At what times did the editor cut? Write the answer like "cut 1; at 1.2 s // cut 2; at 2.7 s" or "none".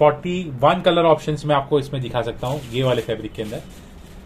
none